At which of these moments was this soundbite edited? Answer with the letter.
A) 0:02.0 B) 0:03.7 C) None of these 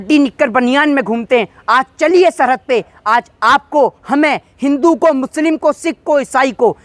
C